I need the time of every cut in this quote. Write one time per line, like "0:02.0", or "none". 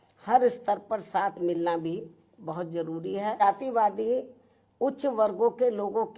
0:03.4

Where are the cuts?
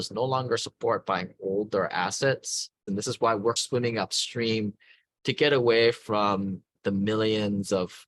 0:02.8

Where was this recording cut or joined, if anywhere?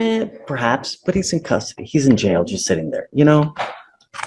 0:01.8

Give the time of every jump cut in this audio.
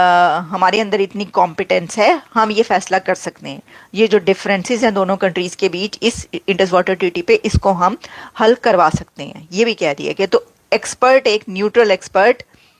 none

